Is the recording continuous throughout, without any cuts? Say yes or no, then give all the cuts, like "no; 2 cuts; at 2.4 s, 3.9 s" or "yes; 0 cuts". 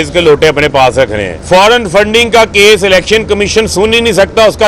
no; 1 cut; at 1.3 s